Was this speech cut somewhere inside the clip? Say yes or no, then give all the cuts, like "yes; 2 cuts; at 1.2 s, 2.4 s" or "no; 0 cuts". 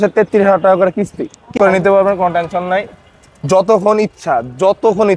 yes; 1 cut; at 1.5 s